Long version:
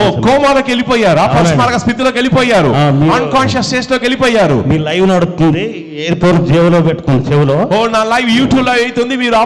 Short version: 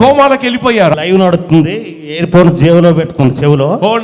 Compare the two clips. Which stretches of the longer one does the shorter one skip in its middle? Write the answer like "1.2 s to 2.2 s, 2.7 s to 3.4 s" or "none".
1.2 s to 4.8 s